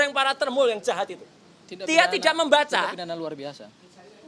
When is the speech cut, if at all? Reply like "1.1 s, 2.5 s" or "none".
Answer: none